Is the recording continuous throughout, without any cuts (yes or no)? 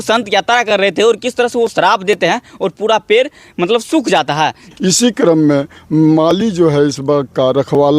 no